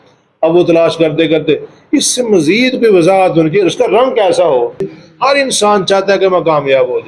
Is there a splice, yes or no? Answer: yes